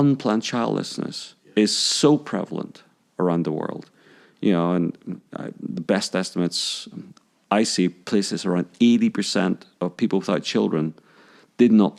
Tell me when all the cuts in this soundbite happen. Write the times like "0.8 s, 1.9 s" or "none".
none